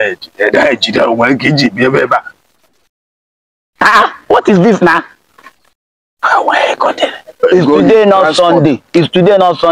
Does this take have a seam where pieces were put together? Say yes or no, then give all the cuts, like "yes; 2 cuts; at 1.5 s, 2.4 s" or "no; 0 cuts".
yes; 1 cut; at 7.4 s